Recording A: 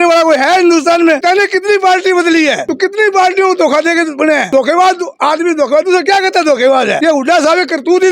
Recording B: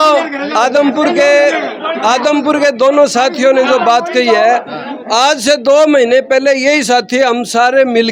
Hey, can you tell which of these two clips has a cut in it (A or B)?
A